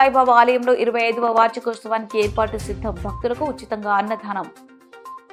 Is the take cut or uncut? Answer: uncut